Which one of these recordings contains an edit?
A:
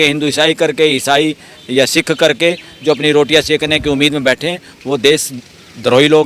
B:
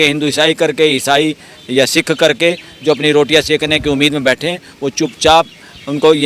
A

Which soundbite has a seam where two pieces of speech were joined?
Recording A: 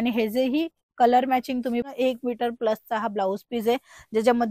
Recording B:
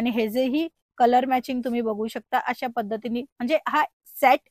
A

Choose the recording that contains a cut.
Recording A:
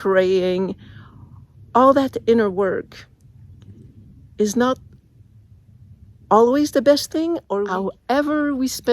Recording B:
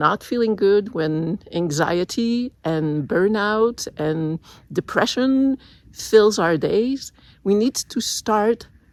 A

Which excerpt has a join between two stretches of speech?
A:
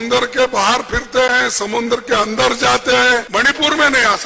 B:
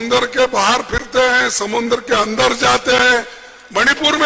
A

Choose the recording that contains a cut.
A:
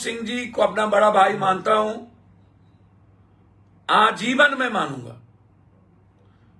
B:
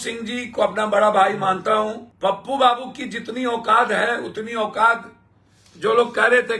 B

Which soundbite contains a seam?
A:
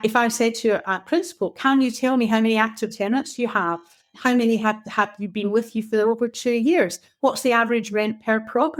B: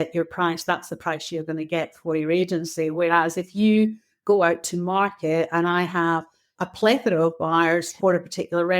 B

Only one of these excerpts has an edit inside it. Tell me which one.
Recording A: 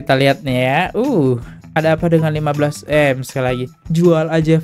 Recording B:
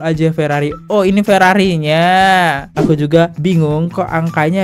B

